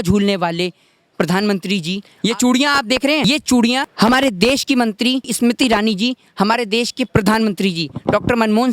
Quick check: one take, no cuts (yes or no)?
no